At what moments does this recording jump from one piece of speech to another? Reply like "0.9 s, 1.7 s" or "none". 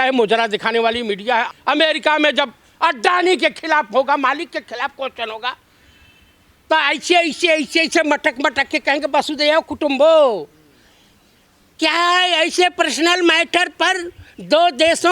1.5 s